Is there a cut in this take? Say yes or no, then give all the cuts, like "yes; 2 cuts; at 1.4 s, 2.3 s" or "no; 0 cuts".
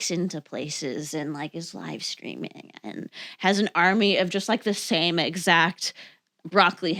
no; 0 cuts